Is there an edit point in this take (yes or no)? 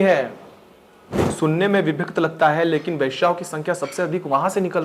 yes